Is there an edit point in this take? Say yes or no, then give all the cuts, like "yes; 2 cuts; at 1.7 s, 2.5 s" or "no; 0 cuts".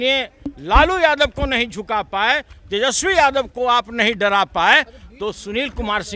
no; 0 cuts